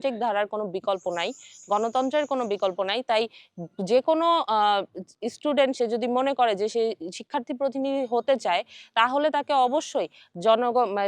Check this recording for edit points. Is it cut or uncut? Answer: uncut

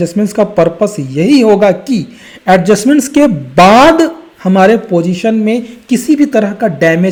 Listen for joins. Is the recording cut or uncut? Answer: uncut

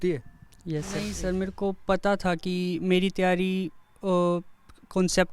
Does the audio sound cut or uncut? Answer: cut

